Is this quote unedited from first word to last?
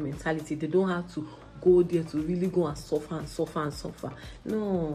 yes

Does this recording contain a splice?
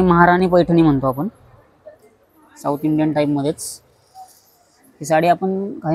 no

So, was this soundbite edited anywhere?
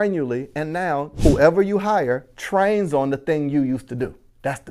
yes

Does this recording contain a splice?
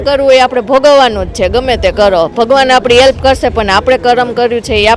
no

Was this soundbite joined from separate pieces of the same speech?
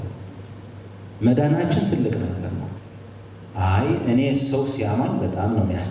yes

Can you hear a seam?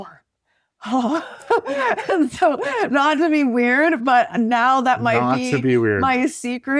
no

